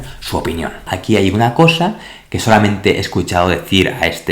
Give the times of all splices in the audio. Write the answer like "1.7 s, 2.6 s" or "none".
0.9 s